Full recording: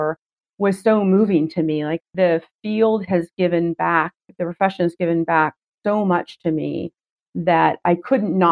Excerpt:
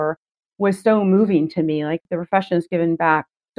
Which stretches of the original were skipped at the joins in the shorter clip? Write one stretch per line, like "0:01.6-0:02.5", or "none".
0:02.0-0:04.3